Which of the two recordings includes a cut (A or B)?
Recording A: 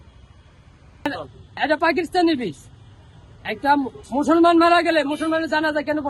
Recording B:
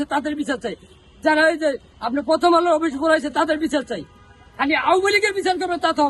A